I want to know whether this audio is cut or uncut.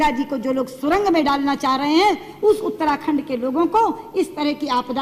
uncut